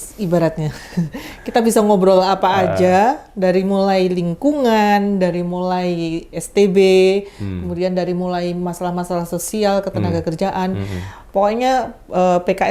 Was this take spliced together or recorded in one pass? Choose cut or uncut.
uncut